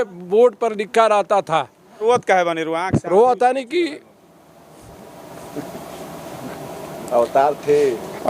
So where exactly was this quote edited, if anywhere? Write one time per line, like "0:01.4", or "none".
0:02.0